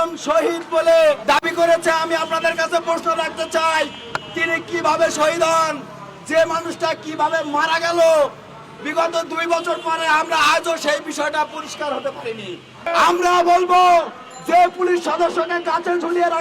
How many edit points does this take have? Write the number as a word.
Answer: two